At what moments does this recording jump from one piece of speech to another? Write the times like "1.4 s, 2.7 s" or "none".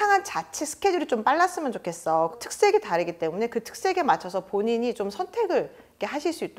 2.3 s